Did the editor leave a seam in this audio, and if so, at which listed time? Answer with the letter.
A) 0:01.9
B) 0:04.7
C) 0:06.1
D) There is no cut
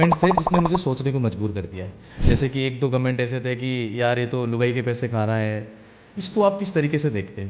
C